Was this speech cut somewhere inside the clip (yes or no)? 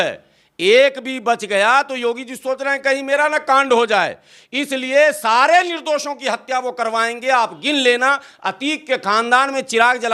no